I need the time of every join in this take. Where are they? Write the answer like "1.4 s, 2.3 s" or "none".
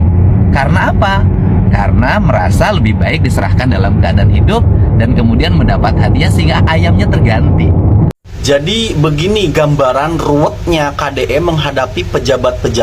8.1 s